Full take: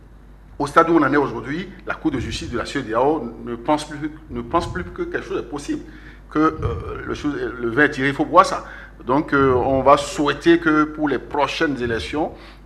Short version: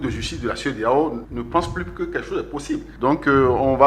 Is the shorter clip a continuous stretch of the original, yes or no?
no